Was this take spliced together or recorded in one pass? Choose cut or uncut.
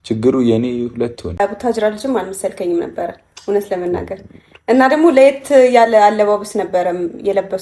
cut